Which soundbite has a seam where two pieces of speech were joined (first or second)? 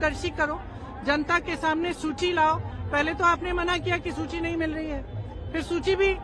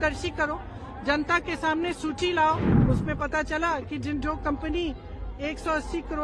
second